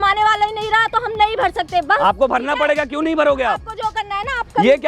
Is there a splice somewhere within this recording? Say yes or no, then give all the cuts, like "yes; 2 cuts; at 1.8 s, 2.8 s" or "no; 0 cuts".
no; 0 cuts